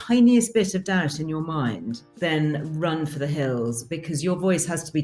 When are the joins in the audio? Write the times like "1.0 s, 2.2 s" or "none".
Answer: 2.0 s